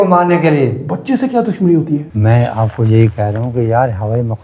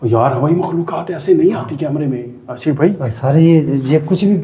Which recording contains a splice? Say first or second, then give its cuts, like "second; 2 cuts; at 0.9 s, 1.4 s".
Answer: first; 1 cut; at 2.0 s